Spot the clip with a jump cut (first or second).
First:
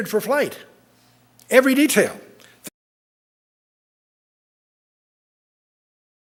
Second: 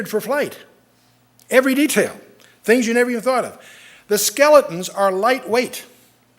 second